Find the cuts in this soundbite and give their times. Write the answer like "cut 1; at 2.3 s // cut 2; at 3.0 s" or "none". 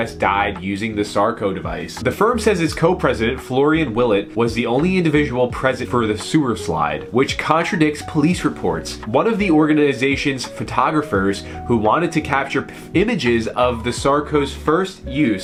none